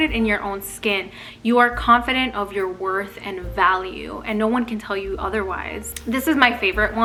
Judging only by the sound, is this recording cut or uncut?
uncut